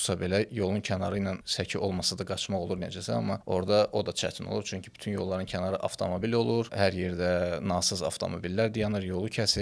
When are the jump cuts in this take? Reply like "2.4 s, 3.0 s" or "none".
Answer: 1.5 s, 3.4 s, 6.7 s